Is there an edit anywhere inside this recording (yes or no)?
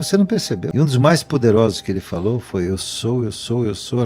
yes